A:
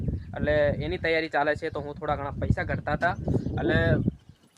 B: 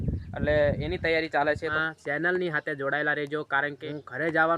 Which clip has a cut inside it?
B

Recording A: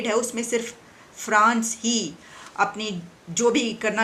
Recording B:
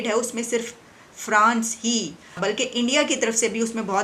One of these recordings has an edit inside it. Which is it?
B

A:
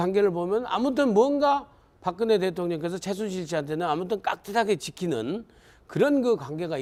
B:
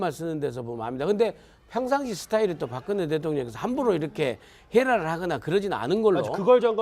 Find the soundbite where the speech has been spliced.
B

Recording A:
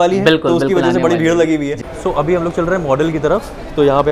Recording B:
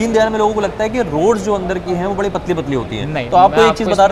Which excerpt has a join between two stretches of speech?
A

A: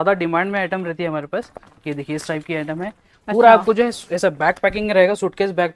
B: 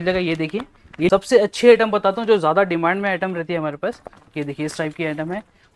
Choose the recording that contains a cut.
B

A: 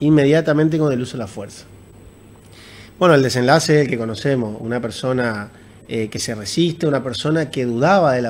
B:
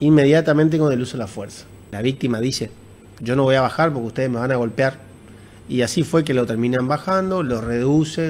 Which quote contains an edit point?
B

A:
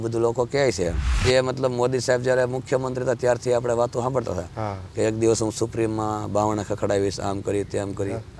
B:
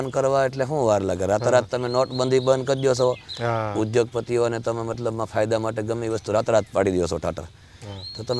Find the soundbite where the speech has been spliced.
A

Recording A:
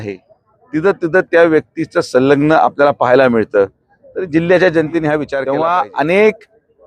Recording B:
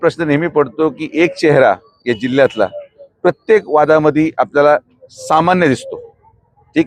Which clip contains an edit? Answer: A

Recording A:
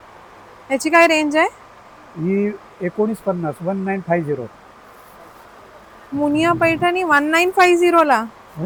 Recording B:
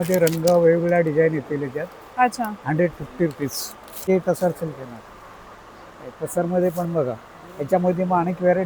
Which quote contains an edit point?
B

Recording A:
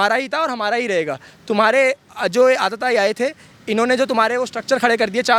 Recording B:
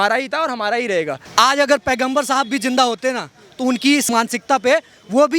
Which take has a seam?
B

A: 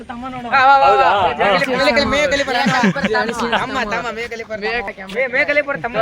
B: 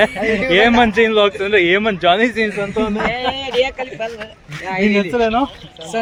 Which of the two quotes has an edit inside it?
A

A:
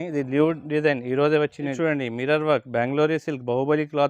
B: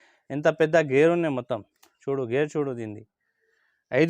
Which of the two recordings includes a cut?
A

